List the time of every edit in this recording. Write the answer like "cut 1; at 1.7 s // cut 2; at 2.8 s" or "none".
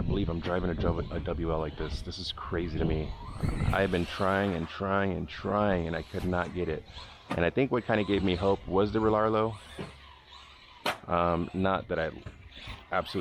none